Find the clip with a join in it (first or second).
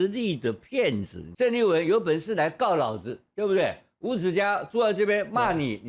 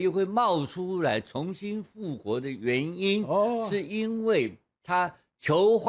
first